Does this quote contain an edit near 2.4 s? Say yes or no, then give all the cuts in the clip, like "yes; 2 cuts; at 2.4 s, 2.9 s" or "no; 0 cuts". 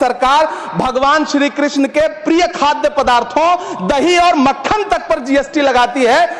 no; 0 cuts